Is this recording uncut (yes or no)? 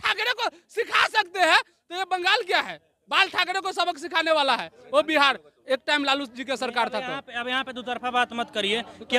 yes